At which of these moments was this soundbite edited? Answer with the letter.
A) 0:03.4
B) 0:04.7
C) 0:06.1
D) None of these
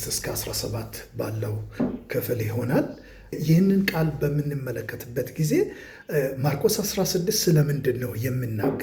A